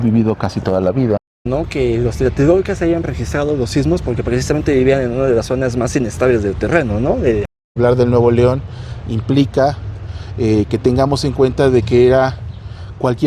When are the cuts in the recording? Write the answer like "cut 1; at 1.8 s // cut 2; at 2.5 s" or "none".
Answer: cut 1; at 1.5 s // cut 2; at 7.7 s